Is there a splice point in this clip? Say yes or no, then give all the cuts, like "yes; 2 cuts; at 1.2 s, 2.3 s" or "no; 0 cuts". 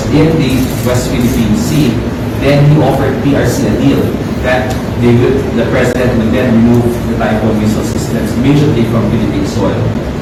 no; 0 cuts